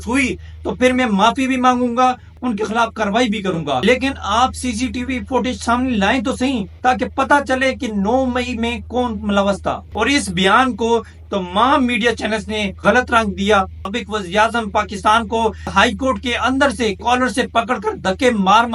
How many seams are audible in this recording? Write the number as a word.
five